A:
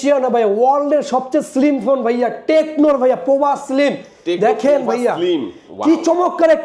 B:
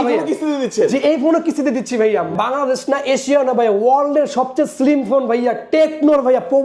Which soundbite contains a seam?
B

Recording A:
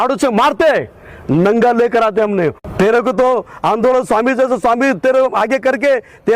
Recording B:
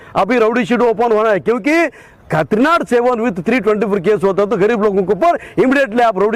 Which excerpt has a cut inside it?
A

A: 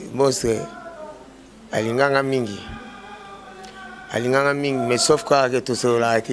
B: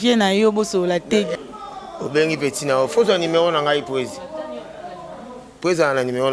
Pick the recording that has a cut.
B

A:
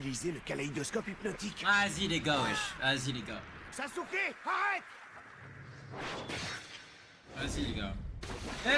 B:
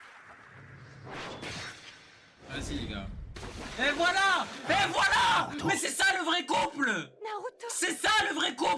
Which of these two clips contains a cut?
A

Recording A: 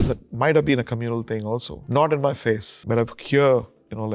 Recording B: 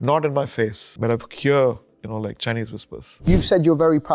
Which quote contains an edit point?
B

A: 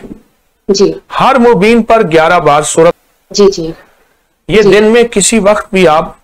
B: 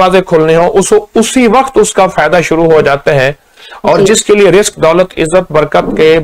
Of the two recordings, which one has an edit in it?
A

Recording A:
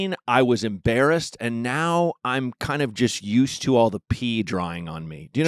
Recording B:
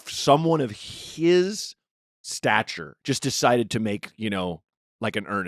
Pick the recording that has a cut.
B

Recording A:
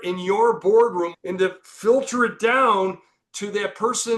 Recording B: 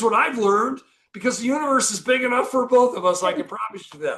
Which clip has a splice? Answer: A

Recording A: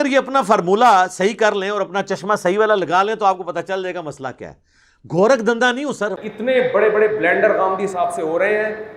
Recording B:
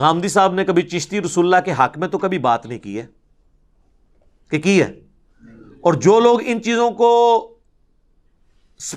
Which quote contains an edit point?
A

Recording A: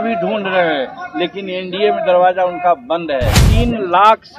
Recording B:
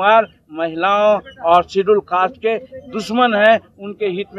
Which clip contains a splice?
A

